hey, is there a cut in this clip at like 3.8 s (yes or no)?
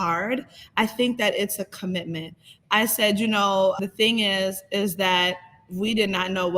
yes